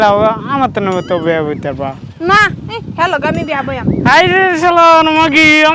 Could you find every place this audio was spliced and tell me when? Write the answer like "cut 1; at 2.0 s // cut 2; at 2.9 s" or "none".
none